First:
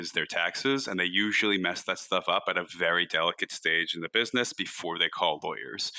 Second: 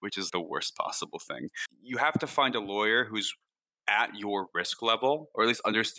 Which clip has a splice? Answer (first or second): second